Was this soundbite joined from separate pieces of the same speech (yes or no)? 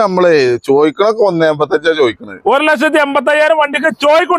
no